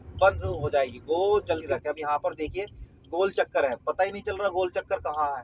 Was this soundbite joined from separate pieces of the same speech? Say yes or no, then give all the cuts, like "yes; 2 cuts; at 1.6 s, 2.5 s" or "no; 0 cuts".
yes; 1 cut; at 1.6 s